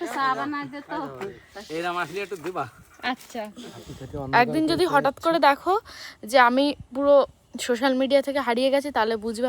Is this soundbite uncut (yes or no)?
no